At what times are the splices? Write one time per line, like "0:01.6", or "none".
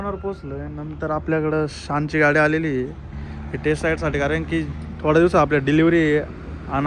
none